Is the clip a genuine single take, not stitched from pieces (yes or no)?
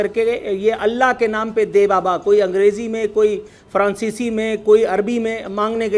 yes